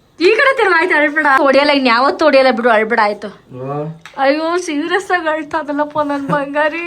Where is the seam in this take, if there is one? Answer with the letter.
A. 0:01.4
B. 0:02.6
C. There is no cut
A